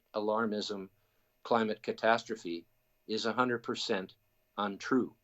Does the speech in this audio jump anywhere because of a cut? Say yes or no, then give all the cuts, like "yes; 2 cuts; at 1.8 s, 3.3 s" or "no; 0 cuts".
no; 0 cuts